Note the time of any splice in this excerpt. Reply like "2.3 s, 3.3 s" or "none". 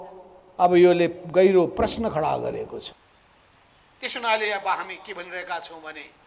none